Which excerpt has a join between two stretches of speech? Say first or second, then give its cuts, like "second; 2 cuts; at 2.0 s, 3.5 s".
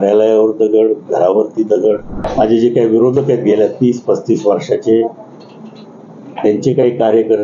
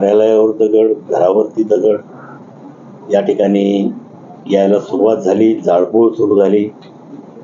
first; 1 cut; at 2.3 s